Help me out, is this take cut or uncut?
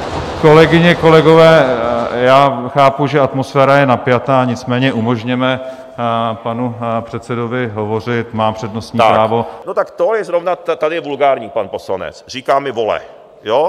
cut